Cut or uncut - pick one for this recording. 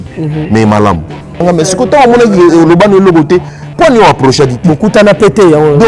cut